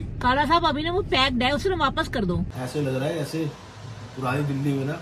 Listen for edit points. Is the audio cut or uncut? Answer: cut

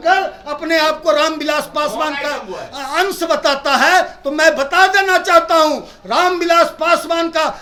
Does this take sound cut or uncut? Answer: uncut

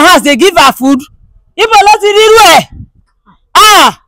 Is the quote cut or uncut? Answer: uncut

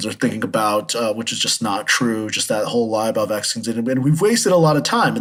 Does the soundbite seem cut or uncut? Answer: uncut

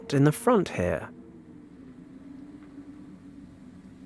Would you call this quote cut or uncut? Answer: uncut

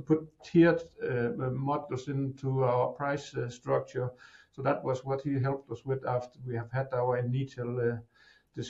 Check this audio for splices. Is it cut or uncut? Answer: uncut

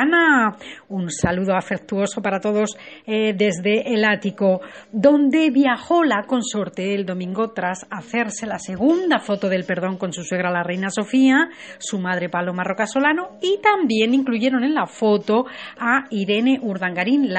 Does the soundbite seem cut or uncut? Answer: cut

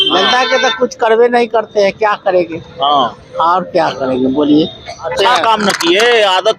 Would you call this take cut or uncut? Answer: cut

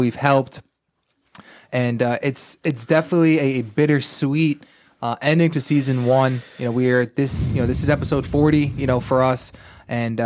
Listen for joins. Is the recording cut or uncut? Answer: uncut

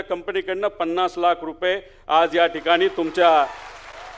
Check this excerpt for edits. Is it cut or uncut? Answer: uncut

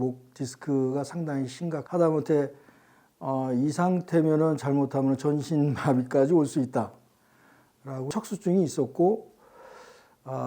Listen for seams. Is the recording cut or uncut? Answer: cut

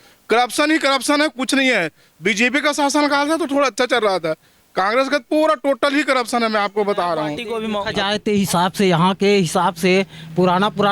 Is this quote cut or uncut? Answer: cut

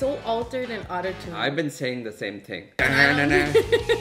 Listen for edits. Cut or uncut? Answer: cut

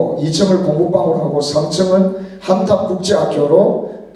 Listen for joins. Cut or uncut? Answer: uncut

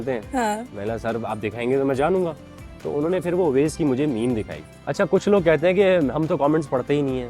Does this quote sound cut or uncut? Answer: cut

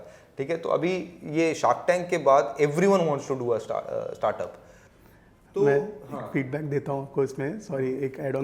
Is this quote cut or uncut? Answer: uncut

